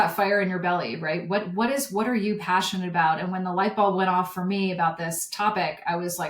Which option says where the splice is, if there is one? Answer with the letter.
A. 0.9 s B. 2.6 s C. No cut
C